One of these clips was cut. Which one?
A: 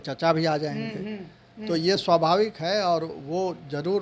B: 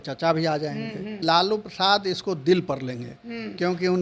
B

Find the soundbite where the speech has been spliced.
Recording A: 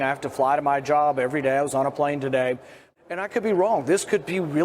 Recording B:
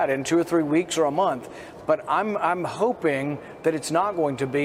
A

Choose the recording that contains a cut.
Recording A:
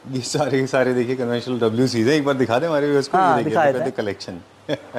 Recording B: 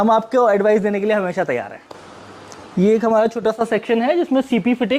B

